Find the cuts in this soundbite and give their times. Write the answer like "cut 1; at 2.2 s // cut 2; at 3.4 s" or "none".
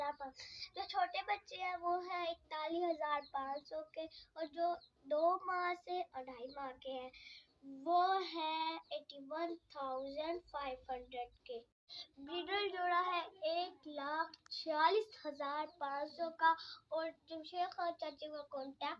none